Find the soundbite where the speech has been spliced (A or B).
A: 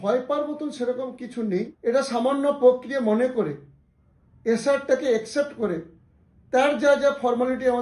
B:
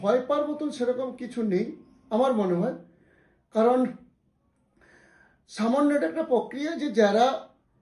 A